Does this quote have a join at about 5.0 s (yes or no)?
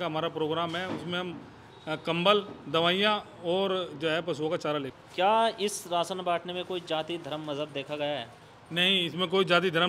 yes